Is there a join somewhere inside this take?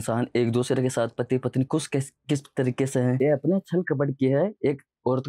yes; 1 cut; at 3.2 s

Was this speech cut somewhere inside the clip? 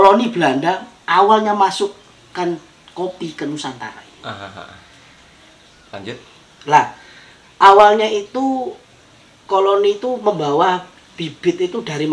no; 0 cuts

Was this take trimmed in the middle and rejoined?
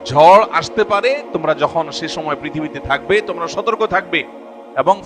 no; 0 cuts

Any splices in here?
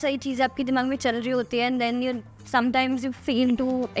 yes; 1 cut; at 2.3 s

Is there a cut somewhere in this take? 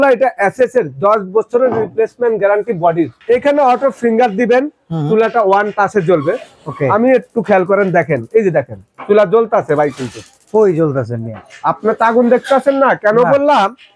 yes; 1 cut; at 2.9 s

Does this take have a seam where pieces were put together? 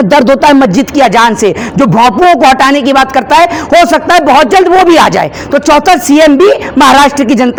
no; 0 cuts

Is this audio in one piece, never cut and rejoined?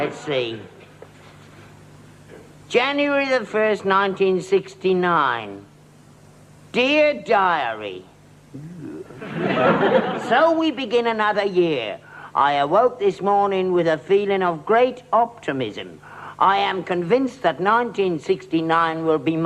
yes; 0 cuts

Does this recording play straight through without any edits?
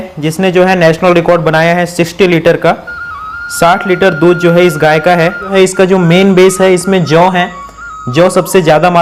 no; 1 cut; at 5.5 s

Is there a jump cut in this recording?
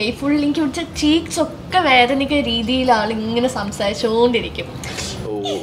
no; 0 cuts

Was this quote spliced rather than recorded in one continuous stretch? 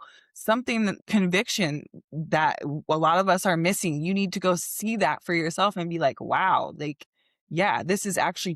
yes; 1 cut; at 1.0 s

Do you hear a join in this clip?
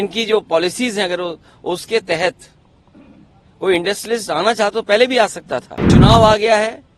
yes; 1 cut; at 5.9 s

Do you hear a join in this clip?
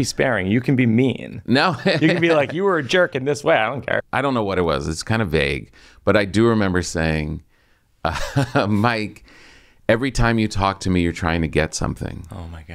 yes; 1 cut; at 4.0 s

